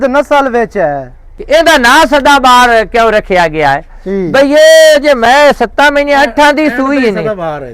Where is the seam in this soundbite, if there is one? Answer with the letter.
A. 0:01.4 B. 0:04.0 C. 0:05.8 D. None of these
A